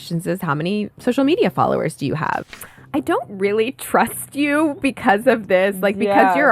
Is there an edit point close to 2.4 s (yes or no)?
yes